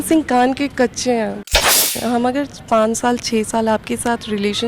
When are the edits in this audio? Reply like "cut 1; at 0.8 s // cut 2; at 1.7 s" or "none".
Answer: cut 1; at 1.5 s